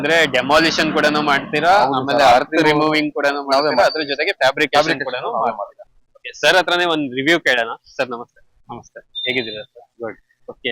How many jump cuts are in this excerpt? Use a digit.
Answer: 1